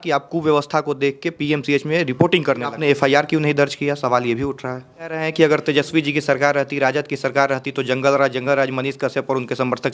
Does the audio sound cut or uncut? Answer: cut